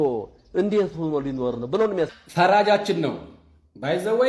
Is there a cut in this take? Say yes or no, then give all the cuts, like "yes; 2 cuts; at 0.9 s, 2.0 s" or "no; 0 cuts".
yes; 1 cut; at 2.2 s